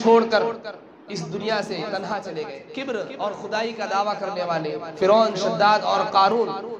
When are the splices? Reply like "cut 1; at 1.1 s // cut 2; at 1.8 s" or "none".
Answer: cut 1; at 2.6 s